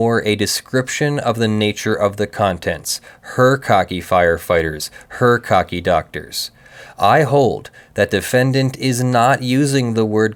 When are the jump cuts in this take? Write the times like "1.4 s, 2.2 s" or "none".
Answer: none